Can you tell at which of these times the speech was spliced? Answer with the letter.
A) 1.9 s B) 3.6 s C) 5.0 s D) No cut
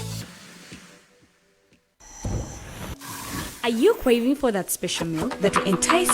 A